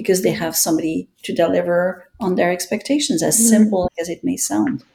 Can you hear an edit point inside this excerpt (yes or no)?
yes